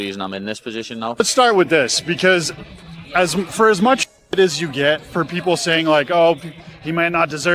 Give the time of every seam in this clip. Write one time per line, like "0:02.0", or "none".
0:01.2
0:06.6